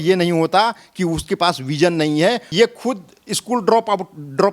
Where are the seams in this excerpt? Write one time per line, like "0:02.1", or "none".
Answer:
0:02.4